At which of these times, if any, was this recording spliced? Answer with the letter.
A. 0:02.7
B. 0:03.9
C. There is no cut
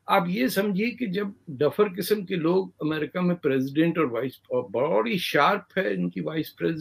C